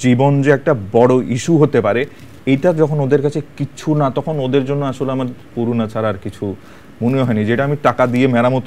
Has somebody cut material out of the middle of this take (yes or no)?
no